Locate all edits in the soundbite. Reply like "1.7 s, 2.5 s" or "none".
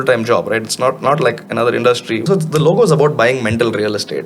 2.2 s

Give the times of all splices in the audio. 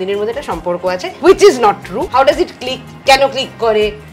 1.1 s, 2.1 s

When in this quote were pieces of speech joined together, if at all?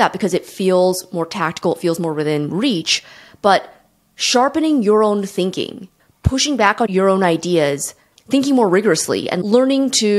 9.3 s

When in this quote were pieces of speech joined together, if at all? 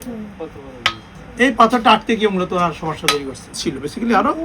1.2 s, 3.6 s

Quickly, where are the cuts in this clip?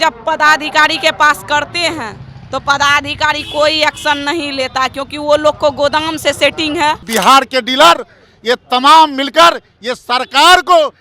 7.0 s

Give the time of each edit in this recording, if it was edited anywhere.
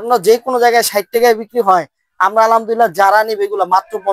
none

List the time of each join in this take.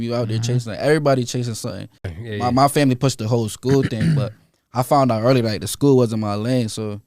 2.1 s

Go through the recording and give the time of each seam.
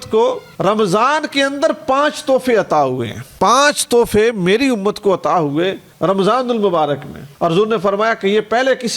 none

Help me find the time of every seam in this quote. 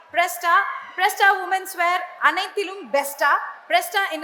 none

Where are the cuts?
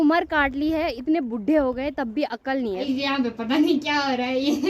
2.8 s

